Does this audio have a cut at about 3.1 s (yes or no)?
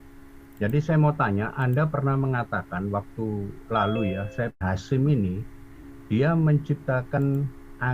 no